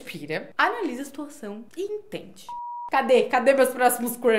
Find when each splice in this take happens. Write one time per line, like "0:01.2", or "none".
0:02.8